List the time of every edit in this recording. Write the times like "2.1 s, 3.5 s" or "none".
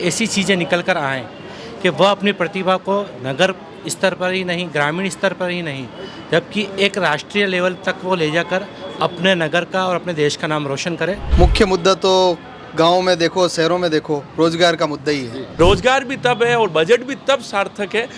11.2 s, 15.5 s